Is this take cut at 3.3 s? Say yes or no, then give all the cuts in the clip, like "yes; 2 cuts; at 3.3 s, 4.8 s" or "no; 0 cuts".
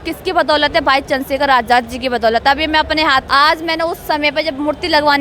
yes; 1 cut; at 3.3 s